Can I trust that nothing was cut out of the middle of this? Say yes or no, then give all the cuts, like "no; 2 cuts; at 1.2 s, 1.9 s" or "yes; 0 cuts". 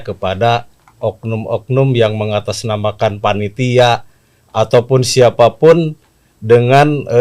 yes; 0 cuts